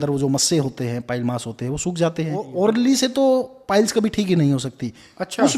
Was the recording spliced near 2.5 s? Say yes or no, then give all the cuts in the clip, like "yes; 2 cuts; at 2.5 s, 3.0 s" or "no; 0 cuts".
yes; 1 cut; at 2.5 s